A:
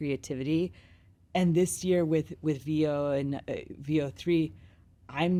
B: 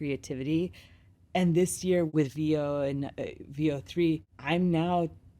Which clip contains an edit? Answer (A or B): B